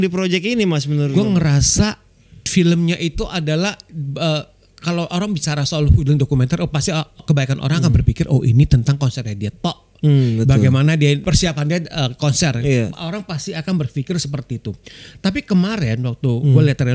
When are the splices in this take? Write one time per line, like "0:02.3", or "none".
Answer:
0:00.9
0:07.1
0:11.2